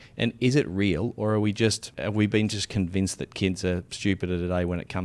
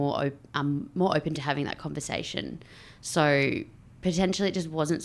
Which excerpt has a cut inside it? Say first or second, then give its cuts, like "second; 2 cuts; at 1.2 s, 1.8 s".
first; 2 cuts; at 1.9 s, 3.9 s